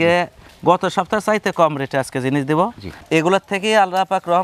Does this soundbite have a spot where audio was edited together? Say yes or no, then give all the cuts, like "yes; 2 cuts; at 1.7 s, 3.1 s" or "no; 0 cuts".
yes; 1 cut; at 2.8 s